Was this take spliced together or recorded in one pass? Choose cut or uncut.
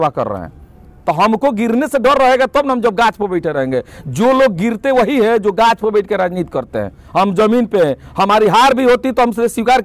uncut